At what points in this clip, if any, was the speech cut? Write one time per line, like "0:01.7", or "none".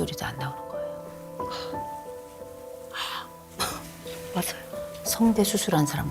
none